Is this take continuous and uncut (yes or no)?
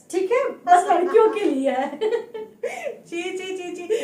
yes